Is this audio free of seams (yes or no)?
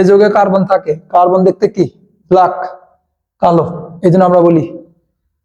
yes